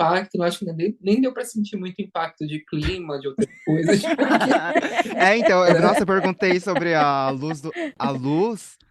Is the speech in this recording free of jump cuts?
no; 1 cut; at 7.9 s

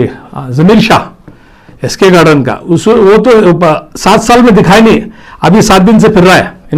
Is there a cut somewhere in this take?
no; 0 cuts

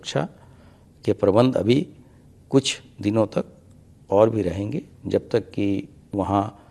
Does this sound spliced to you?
no; 0 cuts

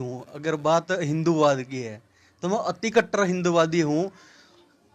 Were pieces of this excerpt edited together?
no; 0 cuts

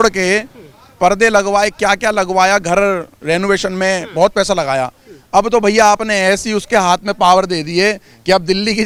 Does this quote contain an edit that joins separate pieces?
no; 0 cuts

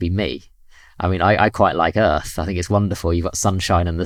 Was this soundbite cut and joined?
no; 0 cuts

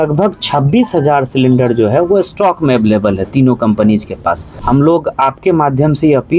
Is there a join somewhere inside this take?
yes; 1 cut; at 4.5 s

